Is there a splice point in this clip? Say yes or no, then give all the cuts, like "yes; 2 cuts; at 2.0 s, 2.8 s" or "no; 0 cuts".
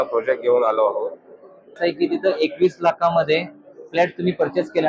yes; 1 cut; at 1.8 s